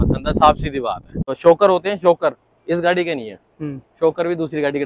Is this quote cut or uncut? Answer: cut